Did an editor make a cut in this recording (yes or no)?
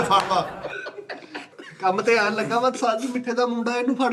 yes